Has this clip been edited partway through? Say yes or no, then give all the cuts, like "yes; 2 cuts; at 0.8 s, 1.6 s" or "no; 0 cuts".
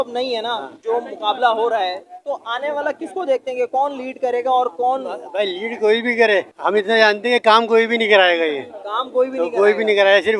no; 0 cuts